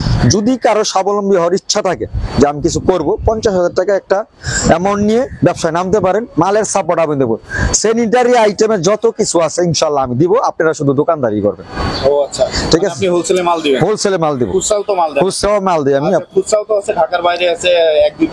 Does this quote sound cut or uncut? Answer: uncut